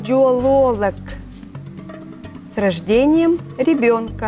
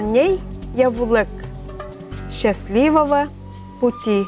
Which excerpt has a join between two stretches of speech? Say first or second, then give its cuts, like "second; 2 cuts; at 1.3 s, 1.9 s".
first; 2 cuts; at 1.0 s, 2.5 s